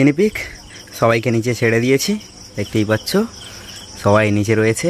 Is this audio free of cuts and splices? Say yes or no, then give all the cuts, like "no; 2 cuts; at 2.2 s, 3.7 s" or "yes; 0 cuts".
yes; 0 cuts